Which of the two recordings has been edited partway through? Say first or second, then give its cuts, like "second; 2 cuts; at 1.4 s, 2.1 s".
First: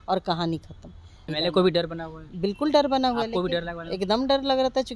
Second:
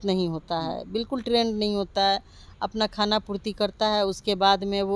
first; 1 cut; at 1.3 s